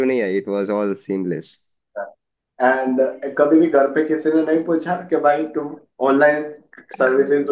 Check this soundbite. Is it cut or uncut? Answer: uncut